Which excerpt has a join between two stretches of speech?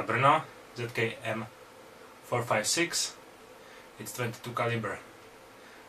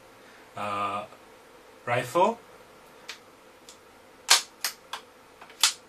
second; 1 cut; at 3.0 s

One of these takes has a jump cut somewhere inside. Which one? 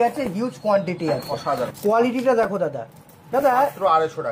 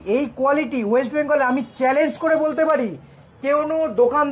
first; 1 cut; at 1.7 s

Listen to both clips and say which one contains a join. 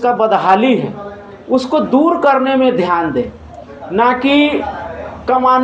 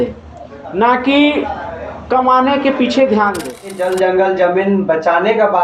second; 1 cut; at 3.8 s

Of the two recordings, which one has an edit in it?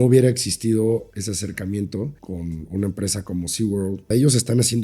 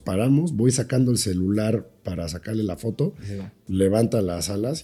first; 3 cuts; at 1.1 s, 2.2 s, 4.1 s

